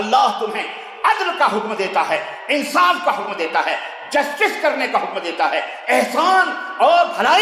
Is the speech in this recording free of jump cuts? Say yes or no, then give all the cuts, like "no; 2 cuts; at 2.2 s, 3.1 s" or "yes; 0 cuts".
yes; 0 cuts